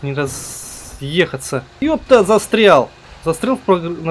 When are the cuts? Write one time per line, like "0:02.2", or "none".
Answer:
0:01.8
0:03.0